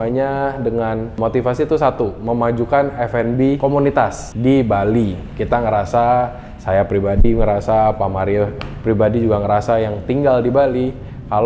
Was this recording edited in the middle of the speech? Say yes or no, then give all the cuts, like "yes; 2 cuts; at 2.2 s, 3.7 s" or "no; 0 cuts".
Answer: yes; 3 cuts; at 1.2 s, 4.0 s, 5.3 s